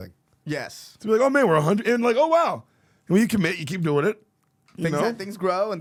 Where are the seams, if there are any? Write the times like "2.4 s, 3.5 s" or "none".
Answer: none